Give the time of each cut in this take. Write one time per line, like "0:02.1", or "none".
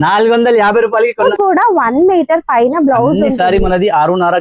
0:01.3